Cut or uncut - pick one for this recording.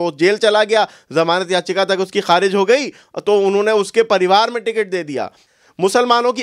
cut